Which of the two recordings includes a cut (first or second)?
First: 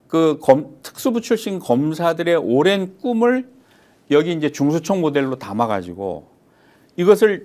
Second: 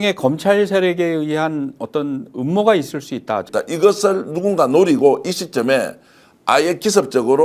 second